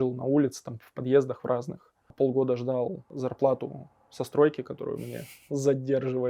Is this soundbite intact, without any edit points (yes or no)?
no